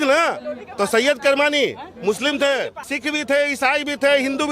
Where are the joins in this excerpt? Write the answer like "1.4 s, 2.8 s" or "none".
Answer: 2.8 s

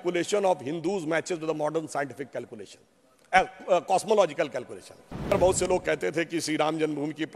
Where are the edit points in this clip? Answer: 5.3 s

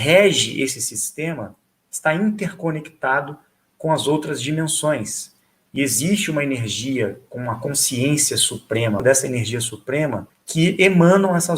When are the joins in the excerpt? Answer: 9.0 s, 10.2 s

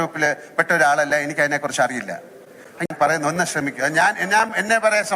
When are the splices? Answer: 2.9 s

